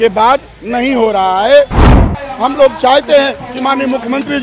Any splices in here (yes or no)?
yes